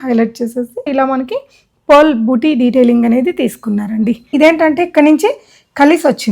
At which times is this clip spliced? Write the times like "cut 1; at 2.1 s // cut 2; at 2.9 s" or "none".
cut 1; at 0.9 s // cut 2; at 4.3 s